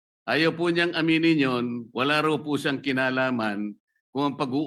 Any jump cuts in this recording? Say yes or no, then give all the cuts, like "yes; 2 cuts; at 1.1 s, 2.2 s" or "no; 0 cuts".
no; 0 cuts